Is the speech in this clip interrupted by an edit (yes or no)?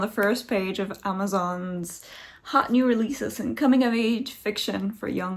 no